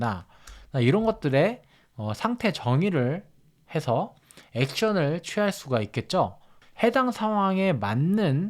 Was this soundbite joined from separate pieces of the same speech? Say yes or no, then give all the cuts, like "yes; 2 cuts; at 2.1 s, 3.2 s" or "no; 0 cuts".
yes; 1 cut; at 6.6 s